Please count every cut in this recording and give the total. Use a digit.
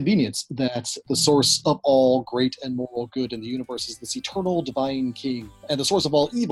2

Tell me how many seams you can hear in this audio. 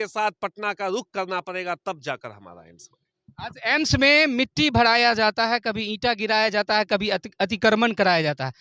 0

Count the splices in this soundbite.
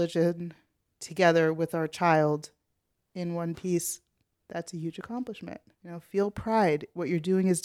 1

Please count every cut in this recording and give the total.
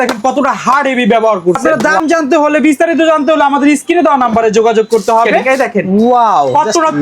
2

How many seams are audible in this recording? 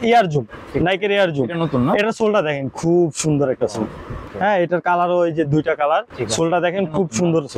1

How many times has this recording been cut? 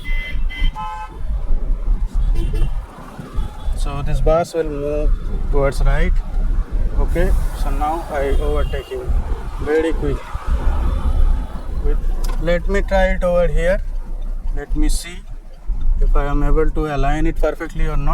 1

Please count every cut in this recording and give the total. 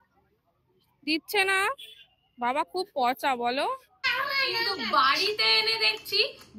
1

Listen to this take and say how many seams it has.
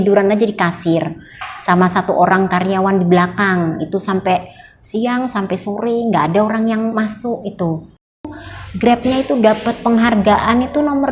1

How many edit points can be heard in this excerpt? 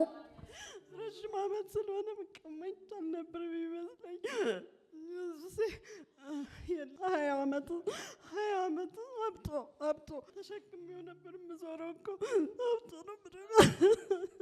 1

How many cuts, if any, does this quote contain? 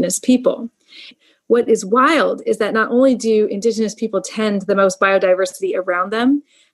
1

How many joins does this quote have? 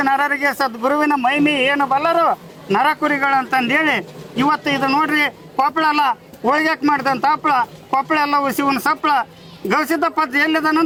0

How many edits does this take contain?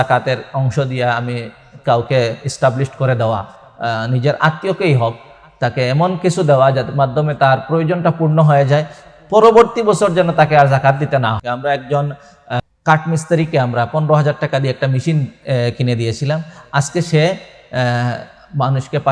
2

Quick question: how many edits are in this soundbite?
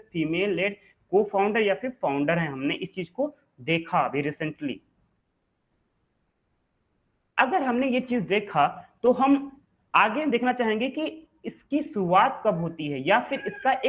0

